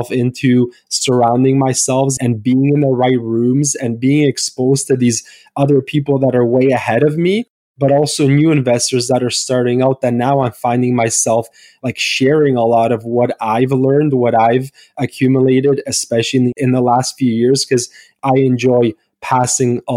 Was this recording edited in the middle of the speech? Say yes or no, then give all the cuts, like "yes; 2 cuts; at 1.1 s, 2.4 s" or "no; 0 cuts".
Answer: yes; 2 cuts; at 2.1 s, 16.6 s